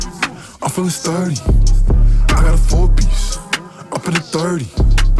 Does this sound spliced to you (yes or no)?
no